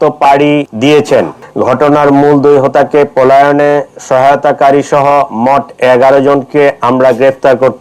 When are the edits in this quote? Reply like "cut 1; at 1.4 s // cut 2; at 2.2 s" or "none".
cut 1; at 1.3 s